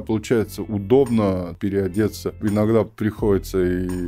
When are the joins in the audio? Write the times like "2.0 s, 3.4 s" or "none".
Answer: 1.5 s, 2.4 s